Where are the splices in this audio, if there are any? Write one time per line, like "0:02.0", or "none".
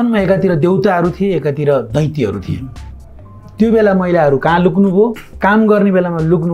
none